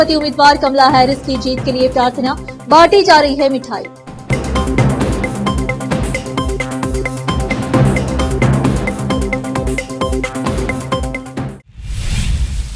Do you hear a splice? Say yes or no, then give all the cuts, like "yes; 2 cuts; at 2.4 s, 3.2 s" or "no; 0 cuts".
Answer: yes; 1 cut; at 11.6 s